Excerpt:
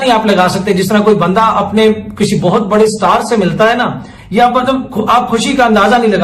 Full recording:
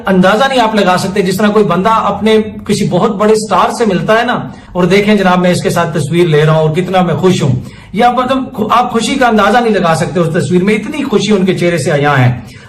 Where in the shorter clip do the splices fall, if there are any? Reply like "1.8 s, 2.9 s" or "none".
4.1 s

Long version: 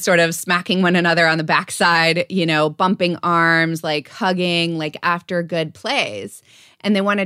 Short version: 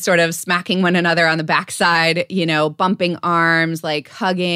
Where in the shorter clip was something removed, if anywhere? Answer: none

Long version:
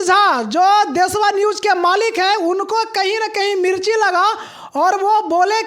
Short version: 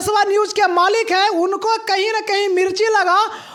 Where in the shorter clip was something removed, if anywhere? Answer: none

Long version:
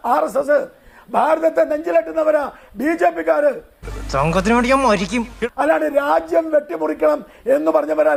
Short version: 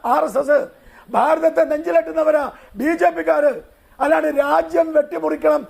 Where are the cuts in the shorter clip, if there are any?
3.8 s

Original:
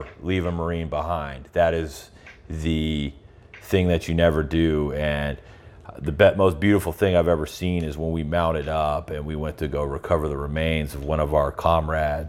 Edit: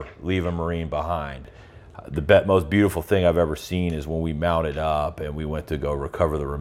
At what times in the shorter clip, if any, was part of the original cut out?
1.4 s

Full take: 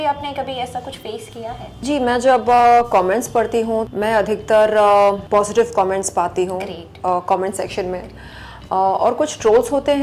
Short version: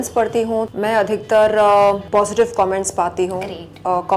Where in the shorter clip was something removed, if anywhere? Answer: none

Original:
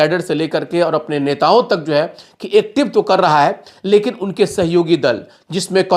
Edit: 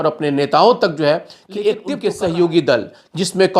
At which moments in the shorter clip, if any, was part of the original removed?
1.9 s

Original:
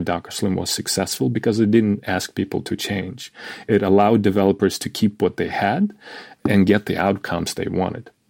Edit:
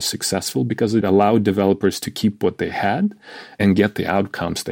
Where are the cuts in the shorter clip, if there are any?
1.0 s, 3.6 s

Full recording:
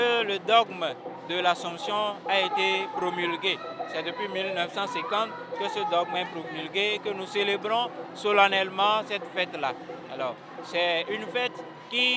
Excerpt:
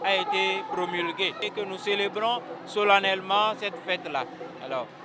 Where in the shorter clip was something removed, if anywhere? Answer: 1.5 s

